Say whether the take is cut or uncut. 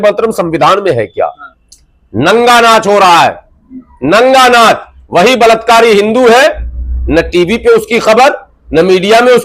cut